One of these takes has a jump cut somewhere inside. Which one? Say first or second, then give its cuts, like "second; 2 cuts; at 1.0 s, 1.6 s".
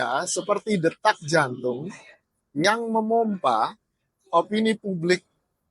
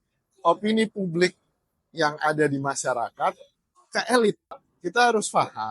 second; 1 cut; at 4.7 s